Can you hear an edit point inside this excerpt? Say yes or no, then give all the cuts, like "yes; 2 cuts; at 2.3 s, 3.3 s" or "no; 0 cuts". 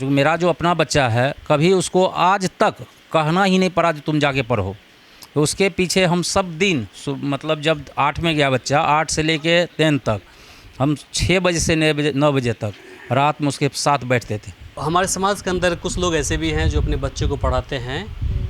yes; 1 cut; at 14.7 s